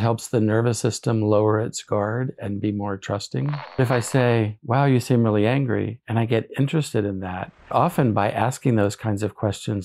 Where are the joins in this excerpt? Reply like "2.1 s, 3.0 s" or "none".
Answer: 3.8 s, 7.7 s